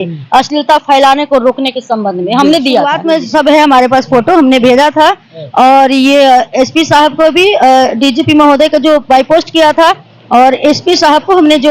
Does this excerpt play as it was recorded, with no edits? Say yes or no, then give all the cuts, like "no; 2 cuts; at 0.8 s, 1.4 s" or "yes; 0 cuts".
no; 1 cut; at 3.0 s